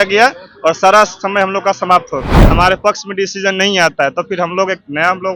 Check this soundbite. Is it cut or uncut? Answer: cut